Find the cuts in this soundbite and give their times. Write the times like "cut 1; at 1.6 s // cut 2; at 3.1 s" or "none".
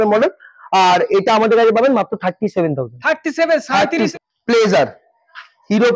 cut 1; at 4.1 s